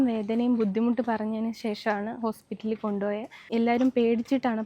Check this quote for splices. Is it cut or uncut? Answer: cut